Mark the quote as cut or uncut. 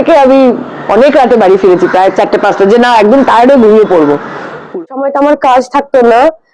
cut